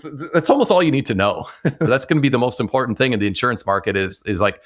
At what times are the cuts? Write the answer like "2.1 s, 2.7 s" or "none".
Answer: 1.9 s